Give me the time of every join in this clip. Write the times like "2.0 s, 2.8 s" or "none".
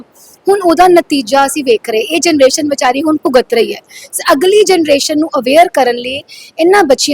none